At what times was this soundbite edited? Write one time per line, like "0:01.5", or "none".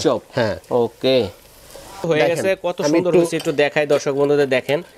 0:02.0